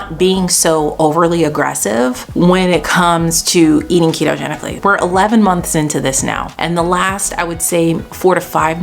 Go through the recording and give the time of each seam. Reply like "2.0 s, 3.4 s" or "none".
2.2 s, 4.7 s, 6.5 s